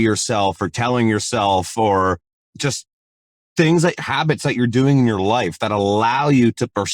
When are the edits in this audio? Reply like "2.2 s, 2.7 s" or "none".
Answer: 2.3 s